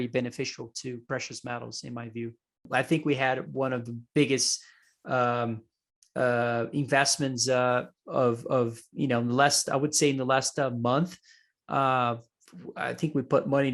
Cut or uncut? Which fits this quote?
cut